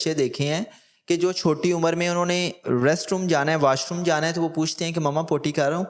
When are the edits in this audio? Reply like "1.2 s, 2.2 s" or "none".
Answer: none